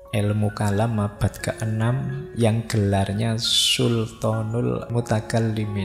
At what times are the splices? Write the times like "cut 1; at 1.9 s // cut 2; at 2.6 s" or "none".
cut 1; at 4.9 s